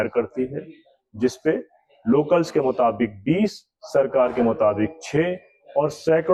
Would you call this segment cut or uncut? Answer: uncut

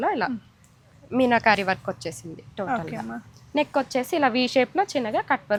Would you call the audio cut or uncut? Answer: uncut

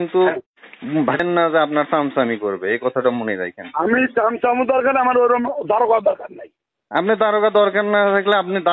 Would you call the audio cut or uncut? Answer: cut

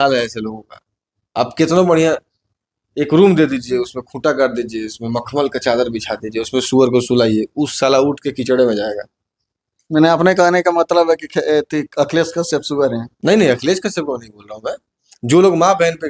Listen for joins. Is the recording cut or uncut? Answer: uncut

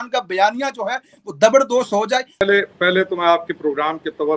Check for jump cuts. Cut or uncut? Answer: cut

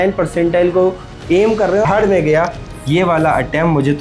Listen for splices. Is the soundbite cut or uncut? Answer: cut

